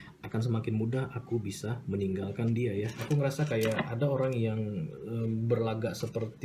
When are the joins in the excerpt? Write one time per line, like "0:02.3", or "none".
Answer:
0:03.0